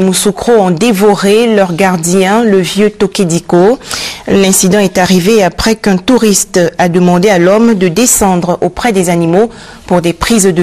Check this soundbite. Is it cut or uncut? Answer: cut